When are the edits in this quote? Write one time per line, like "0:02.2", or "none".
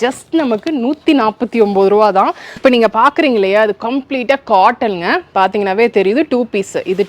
0:02.6

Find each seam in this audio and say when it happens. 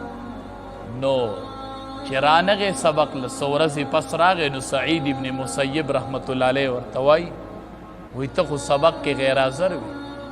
0:00.9

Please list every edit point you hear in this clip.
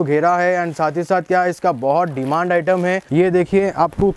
0:03.0

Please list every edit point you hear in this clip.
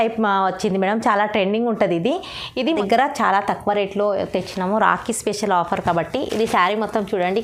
0:02.7

